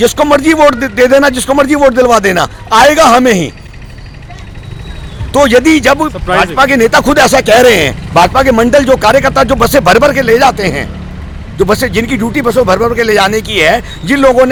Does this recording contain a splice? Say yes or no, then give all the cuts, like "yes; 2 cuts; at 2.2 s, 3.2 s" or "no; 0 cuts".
no; 0 cuts